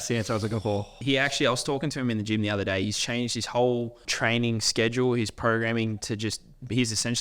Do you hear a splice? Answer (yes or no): yes